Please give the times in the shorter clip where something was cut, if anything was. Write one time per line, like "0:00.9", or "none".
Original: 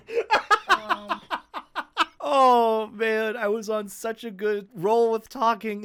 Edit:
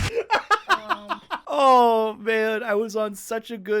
0:01.4